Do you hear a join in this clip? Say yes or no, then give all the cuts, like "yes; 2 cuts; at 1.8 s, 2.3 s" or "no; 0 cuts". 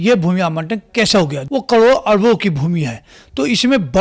yes; 1 cut; at 1.4 s